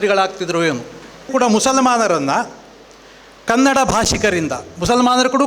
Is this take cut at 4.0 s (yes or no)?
no